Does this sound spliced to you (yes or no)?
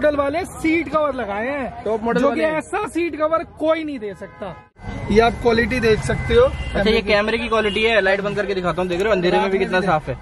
yes